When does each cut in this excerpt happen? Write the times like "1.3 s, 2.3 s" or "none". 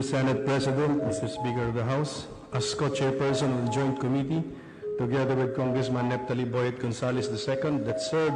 2.2 s